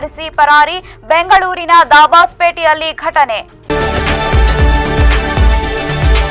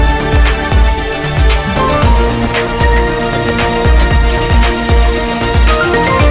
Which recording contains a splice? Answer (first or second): first